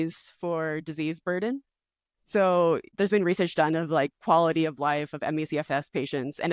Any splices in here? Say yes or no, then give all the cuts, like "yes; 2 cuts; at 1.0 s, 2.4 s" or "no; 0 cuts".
yes; 1 cut; at 2.9 s